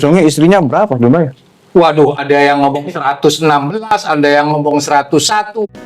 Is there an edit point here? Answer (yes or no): no